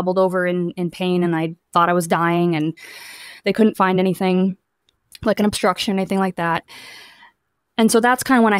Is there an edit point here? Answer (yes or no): no